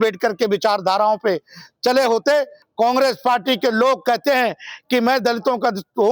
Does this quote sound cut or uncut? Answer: cut